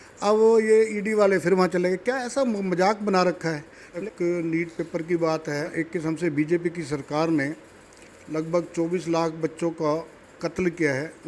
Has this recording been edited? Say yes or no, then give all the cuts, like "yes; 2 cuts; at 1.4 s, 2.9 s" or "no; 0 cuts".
yes; 2 cuts; at 3.9 s, 5.7 s